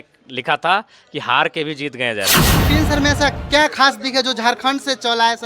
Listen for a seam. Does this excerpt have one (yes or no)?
yes